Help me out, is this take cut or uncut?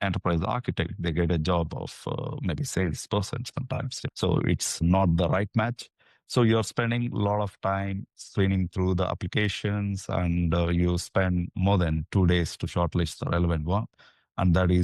uncut